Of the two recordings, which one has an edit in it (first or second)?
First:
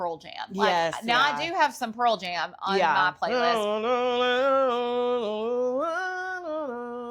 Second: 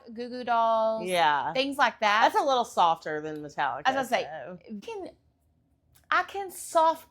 second